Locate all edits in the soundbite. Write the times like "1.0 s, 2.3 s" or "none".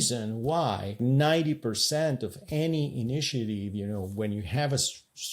1.0 s

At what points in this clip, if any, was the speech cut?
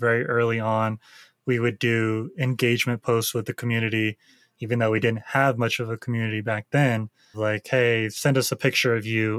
7.3 s

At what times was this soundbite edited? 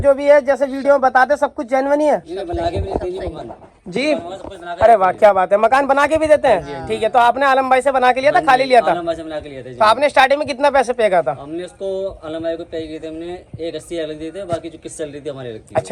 none

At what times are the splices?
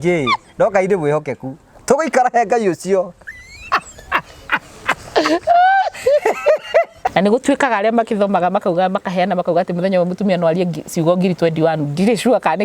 7.0 s

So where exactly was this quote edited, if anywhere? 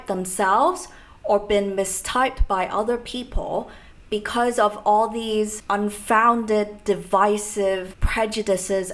5.6 s, 8.0 s

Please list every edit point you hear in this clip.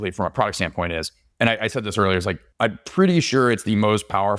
1.2 s, 2.5 s

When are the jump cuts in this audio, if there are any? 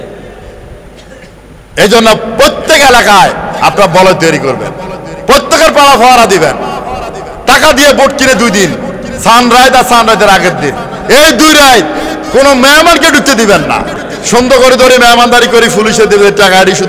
14.1 s

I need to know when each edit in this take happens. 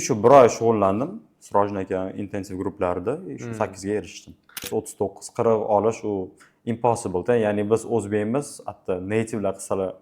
4.7 s

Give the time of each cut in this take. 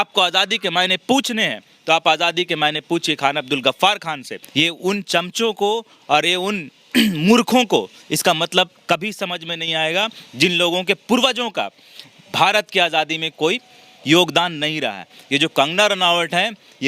4.3 s

